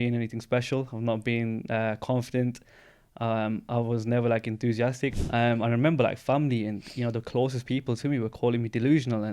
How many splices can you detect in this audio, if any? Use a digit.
1